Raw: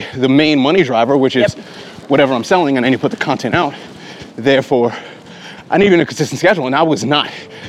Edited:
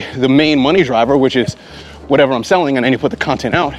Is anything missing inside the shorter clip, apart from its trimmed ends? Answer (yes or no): no